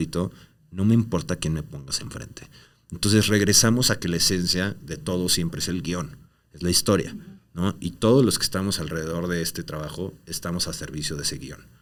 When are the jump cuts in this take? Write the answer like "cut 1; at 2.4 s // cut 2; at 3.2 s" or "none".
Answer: none